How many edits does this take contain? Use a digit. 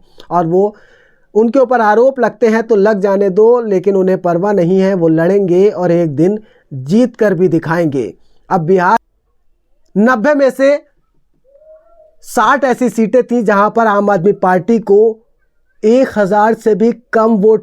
1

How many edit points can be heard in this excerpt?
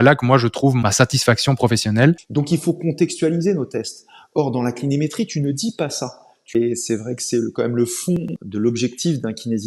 4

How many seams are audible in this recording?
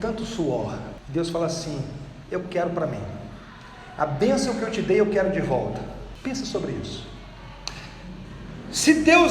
2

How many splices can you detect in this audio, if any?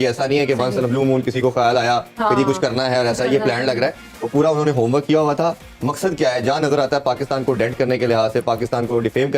0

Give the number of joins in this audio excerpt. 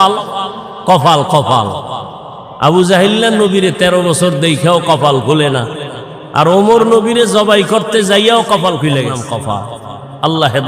1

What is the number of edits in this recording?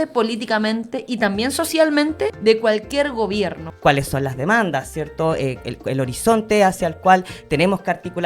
2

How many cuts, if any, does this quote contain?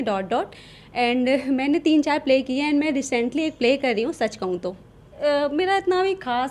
1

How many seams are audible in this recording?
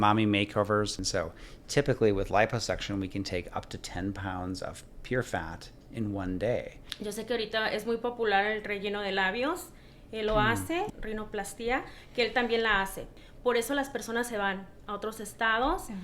4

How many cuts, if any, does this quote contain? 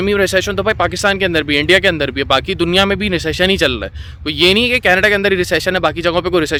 0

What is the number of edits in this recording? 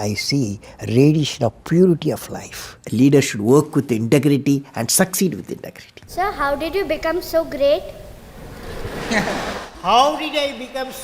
2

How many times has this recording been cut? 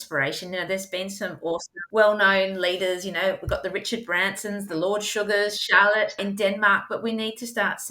2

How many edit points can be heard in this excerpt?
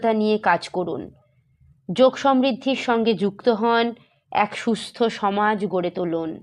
0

